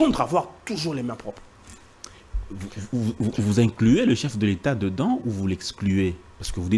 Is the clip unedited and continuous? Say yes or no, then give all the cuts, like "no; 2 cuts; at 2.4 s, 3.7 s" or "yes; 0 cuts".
yes; 0 cuts